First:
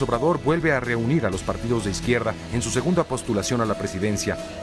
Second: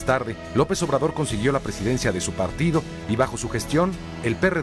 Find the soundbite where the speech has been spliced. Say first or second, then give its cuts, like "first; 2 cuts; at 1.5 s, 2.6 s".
first; 1 cut; at 1.9 s